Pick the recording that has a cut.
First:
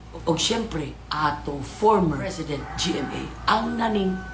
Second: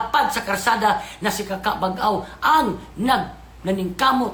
first; 1 cut; at 2.2 s

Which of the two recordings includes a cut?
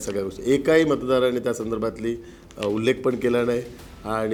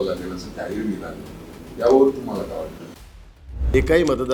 second; 1 cut; at 3.2 s

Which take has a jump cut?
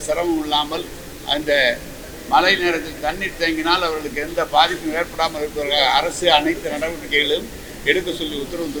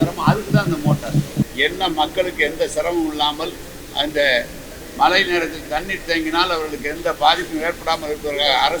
second; 1 cut; at 1.5 s

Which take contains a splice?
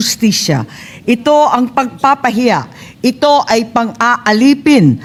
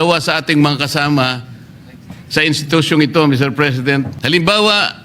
second; 1 cut; at 4.2 s

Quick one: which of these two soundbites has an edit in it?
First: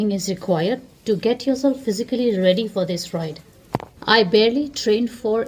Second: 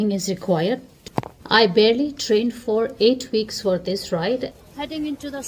second; 2 cuts; at 0.9 s, 4.6 s

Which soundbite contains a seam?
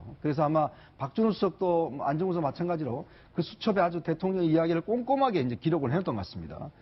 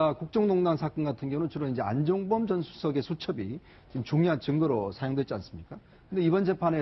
first; 1 cut; at 4.4 s

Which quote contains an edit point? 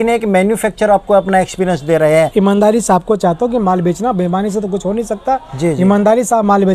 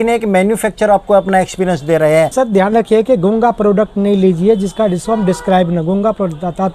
second; 1 cut; at 2.3 s

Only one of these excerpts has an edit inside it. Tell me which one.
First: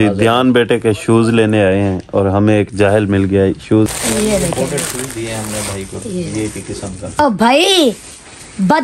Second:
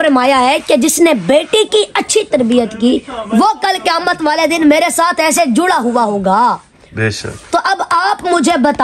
first; 2 cuts; at 3.9 s, 7.2 s

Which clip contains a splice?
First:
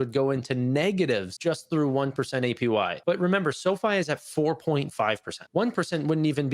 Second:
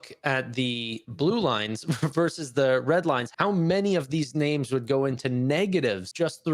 first; 2 cuts; at 3.0 s, 5.4 s

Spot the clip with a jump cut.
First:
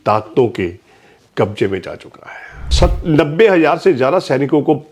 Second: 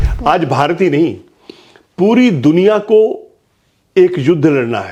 first; 1 cut; at 2.6 s

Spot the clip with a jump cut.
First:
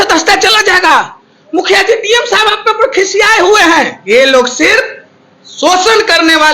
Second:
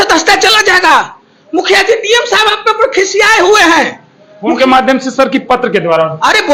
first; 1 cut; at 4.0 s

